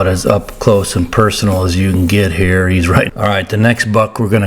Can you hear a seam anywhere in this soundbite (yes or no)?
yes